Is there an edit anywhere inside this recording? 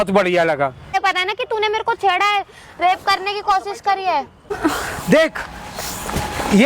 yes; 2 cuts; at 1.0 s, 4.4 s

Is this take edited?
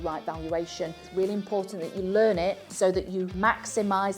yes; 2 cuts; at 1.0 s, 3.0 s

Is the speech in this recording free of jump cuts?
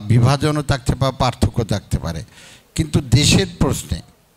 yes; 0 cuts

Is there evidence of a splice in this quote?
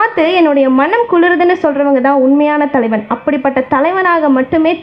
no; 0 cuts

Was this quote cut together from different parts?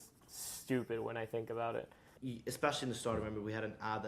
yes; 1 cut; at 2.2 s

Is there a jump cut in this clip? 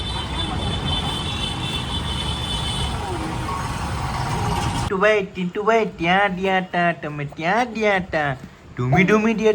yes; 1 cut; at 4.9 s

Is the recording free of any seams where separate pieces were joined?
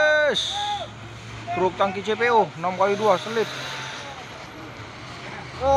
yes; 0 cuts

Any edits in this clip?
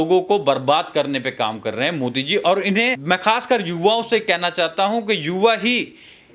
yes; 1 cut; at 3.0 s

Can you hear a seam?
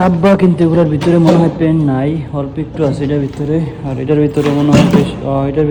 no; 0 cuts

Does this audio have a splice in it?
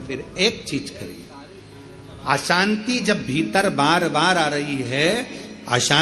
no; 0 cuts

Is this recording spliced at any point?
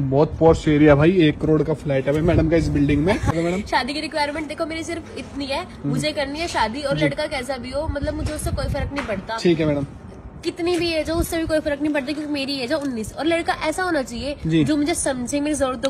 yes; 1 cut; at 3.3 s

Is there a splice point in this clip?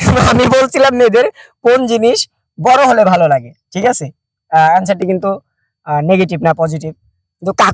no; 0 cuts

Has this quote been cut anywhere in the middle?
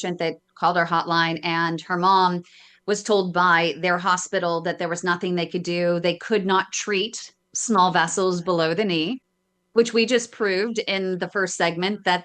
no; 0 cuts

